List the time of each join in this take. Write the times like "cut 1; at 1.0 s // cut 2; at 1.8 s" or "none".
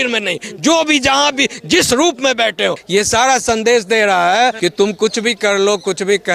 cut 1; at 2.8 s // cut 2; at 4.6 s